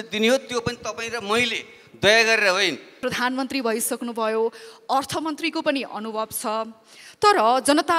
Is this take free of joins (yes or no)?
no